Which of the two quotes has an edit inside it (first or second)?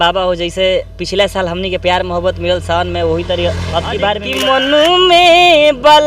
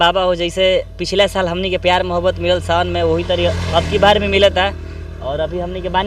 first